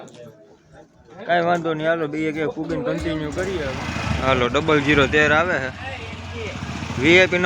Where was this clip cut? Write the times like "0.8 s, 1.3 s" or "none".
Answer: 3.7 s